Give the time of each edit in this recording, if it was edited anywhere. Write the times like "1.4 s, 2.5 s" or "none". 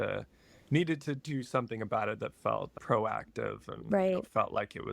2.7 s

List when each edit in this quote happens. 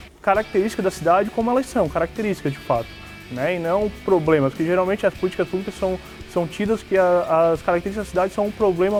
none

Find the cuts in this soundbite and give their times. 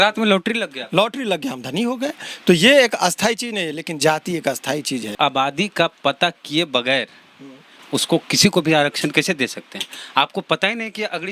5.1 s

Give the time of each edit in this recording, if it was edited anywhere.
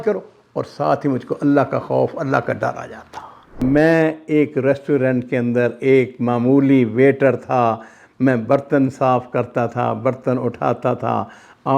3.6 s

